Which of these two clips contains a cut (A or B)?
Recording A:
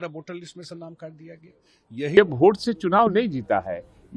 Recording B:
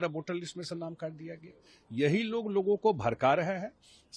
A